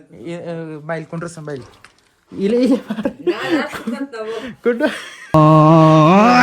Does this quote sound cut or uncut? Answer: cut